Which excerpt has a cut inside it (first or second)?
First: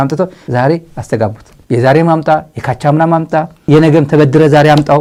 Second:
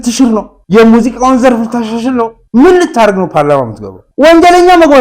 second